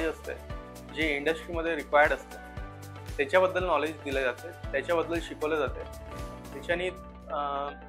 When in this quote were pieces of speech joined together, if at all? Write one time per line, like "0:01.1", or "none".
none